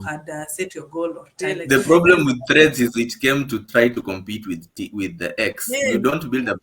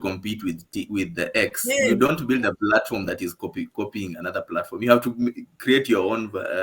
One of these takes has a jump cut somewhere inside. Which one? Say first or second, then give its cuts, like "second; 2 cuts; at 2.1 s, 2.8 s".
first; 1 cut; at 1.4 s